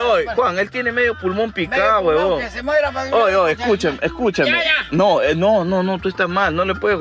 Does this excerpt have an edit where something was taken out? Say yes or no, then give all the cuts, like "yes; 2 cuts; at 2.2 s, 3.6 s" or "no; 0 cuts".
no; 0 cuts